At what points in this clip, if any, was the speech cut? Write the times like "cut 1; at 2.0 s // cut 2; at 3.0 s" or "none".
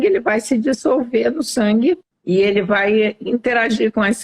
cut 1; at 2.1 s